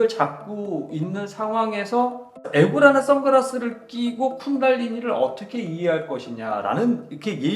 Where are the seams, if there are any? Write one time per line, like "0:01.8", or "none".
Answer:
0:02.4